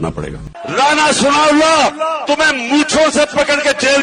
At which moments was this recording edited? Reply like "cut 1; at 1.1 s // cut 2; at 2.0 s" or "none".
none